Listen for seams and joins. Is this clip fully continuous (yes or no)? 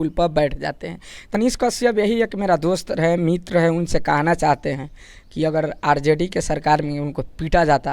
no